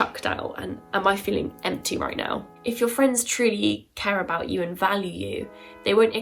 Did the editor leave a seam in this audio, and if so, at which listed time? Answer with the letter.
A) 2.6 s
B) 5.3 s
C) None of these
A